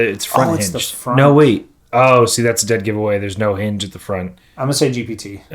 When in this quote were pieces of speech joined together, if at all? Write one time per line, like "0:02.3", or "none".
0:01.7
0:04.4

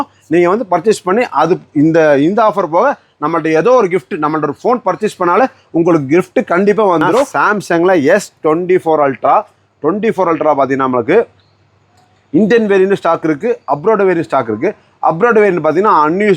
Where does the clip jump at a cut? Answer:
0:07.3

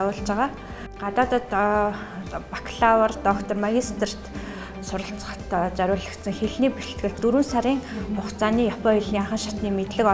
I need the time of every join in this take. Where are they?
0:00.9
0:07.2

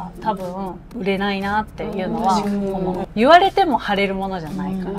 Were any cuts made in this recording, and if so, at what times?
0:00.9
0:03.0

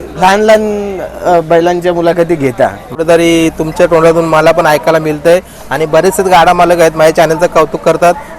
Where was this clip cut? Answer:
0:03.0

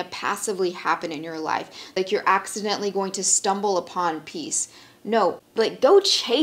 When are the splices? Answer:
0:02.0
0:05.4

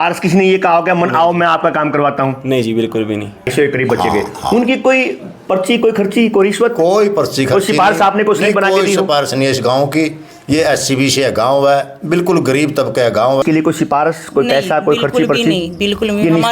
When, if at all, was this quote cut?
0:03.5
0:13.4

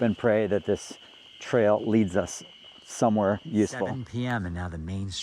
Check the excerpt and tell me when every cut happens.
0:03.8

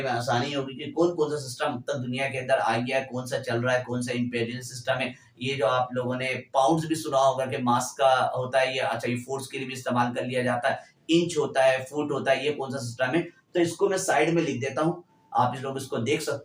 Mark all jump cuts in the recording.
none

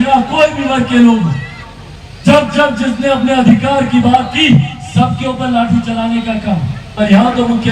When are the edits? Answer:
0:06.8

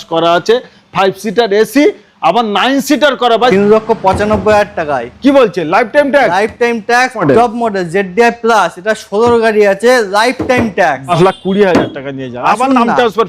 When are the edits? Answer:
0:03.5
0:07.2
0:11.1

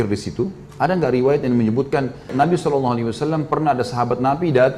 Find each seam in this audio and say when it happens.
0:02.3

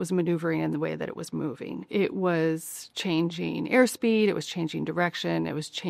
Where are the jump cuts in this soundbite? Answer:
0:01.8

